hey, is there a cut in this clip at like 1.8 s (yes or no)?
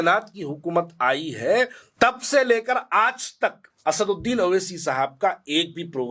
yes